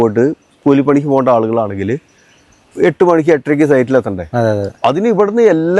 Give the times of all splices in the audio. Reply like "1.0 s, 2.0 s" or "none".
none